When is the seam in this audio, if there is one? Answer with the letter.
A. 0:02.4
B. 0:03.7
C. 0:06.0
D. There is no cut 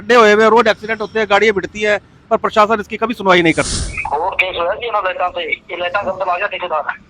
B